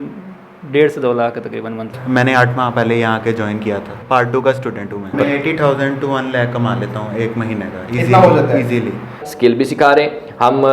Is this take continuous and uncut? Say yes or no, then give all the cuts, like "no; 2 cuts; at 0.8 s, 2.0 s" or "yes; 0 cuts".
no; 4 cuts; at 1.9 s, 3.9 s, 5.1 s, 9.3 s